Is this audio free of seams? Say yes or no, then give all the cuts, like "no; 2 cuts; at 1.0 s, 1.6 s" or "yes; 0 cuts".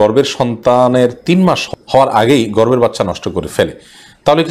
no; 1 cut; at 1.6 s